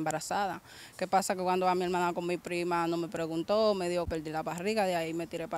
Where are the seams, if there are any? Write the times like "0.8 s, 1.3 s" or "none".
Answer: 4.1 s